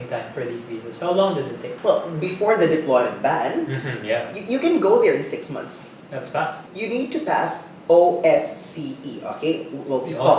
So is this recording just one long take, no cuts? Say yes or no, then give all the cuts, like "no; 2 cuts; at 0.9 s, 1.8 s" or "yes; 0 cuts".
no; 2 cuts; at 1.6 s, 6.6 s